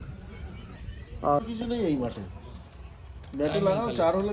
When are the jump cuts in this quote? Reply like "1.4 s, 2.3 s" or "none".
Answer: 1.4 s